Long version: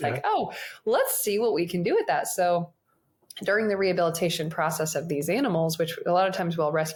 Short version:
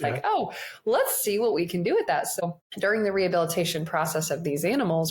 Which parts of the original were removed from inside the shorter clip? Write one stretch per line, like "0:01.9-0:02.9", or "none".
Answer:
0:02.3-0:03.0